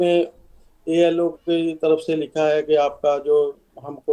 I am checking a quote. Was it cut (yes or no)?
no